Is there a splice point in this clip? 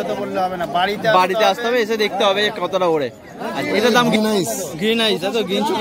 yes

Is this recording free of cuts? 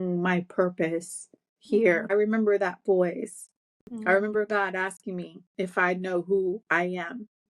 no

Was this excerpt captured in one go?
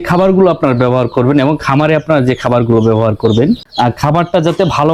yes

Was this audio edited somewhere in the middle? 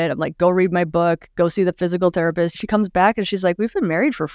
yes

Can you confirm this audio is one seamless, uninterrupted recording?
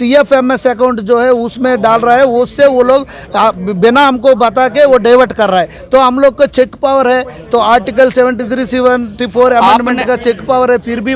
yes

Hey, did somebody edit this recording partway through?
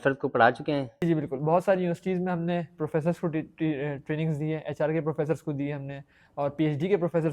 yes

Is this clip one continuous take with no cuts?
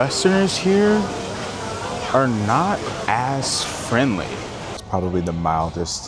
no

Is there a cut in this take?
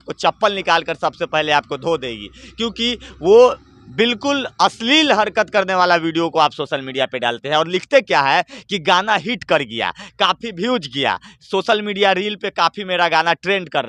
no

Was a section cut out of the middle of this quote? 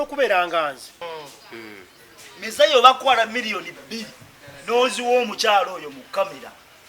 yes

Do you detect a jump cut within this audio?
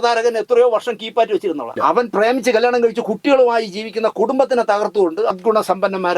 yes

